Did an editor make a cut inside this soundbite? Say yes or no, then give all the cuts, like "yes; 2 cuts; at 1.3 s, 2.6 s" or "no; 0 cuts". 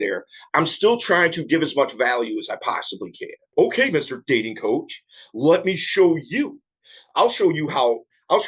yes; 1 cut; at 3.5 s